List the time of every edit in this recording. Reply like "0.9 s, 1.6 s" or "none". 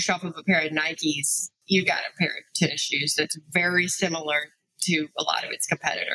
1.6 s